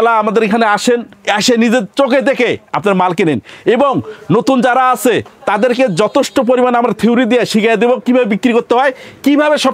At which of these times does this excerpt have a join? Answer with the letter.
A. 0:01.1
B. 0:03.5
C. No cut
C